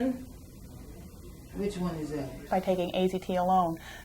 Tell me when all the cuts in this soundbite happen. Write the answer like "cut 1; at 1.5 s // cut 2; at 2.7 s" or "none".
cut 1; at 2.5 s